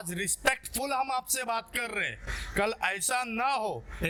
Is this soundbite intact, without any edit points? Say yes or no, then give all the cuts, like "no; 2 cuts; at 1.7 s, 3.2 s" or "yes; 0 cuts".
yes; 0 cuts